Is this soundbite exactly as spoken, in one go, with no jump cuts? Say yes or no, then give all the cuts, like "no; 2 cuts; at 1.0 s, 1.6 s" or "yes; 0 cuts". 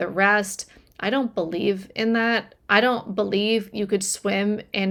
yes; 0 cuts